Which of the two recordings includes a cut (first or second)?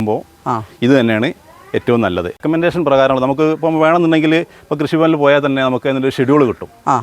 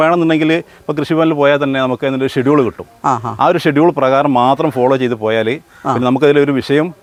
first